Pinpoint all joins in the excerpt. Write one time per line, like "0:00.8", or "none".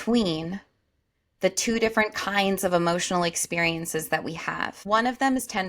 0:04.8